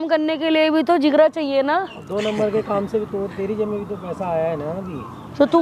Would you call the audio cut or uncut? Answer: uncut